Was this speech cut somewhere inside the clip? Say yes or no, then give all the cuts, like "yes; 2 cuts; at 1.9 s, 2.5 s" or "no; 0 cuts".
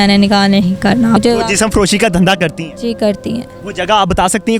yes; 1 cut; at 1.2 s